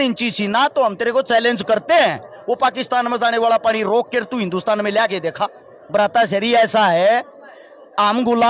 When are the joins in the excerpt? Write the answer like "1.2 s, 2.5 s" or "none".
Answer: 5.8 s